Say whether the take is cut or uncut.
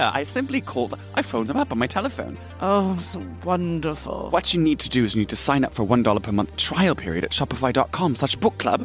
cut